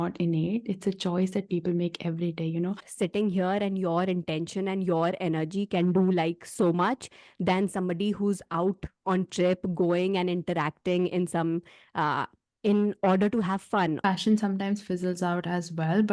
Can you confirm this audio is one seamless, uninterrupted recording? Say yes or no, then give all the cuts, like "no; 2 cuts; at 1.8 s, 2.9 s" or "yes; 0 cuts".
no; 2 cuts; at 2.9 s, 14.0 s